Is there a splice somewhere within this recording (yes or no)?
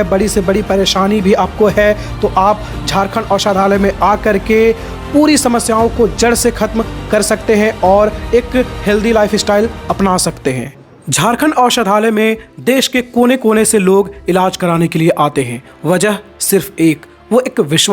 yes